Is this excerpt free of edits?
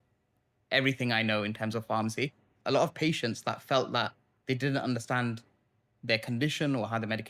no; 1 cut; at 2.6 s

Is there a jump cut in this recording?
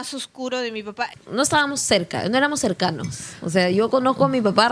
yes; 1 cut; at 1.1 s

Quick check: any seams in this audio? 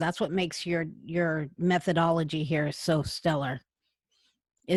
no; 0 cuts

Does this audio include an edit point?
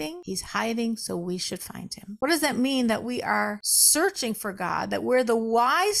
yes; 1 cut; at 2.1 s

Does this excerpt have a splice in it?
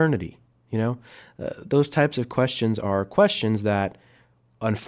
no; 0 cuts

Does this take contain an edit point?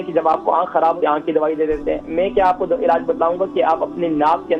yes; 2 cuts; at 1.0 s, 2.1 s

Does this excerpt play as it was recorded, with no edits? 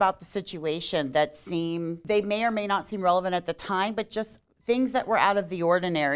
no; 1 cut; at 2.0 s

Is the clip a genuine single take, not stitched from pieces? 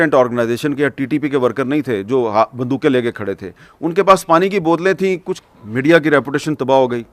no; 1 cut; at 5.3 s

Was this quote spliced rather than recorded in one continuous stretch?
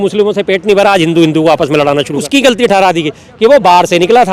yes; 1 cut; at 2.2 s

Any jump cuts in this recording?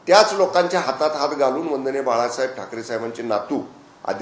no; 0 cuts

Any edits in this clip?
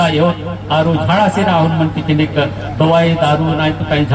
no; 0 cuts

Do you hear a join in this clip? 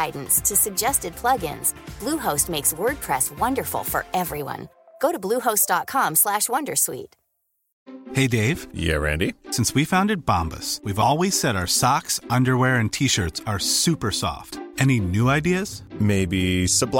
no; 0 cuts

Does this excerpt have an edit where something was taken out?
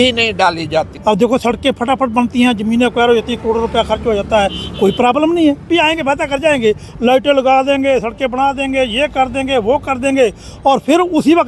yes; 2 cuts; at 0.9 s, 5.7 s

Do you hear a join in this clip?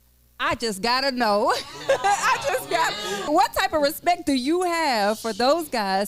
yes; 1 cut; at 3.3 s

